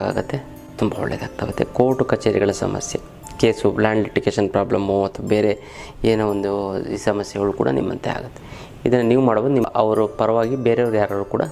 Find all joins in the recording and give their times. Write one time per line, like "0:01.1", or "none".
0:09.7